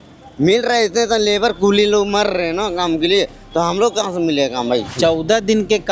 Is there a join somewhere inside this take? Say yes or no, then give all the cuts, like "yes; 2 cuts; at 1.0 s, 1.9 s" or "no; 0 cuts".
yes; 1 cut; at 5.0 s